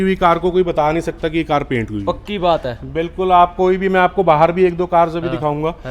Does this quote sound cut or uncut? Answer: uncut